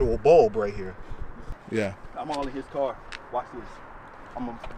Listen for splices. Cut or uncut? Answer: cut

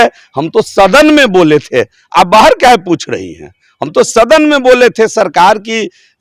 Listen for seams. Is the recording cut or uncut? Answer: uncut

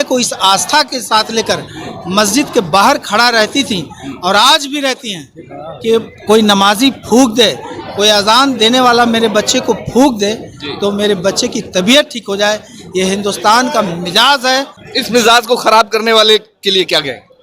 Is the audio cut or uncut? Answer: cut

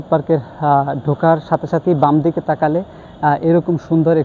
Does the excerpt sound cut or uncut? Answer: uncut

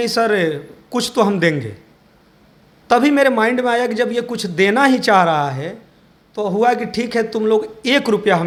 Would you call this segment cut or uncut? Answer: uncut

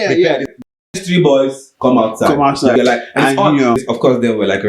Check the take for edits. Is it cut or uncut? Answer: cut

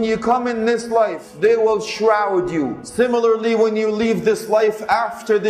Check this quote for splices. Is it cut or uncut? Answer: cut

